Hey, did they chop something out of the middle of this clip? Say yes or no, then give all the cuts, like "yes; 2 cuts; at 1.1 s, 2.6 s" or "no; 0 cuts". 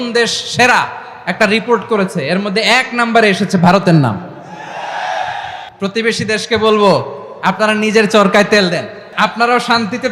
yes; 2 cuts; at 5.6 s, 9.0 s